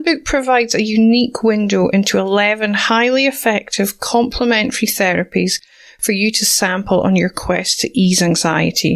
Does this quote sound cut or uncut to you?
uncut